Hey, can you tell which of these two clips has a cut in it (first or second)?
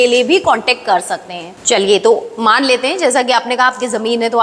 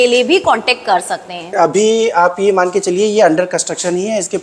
second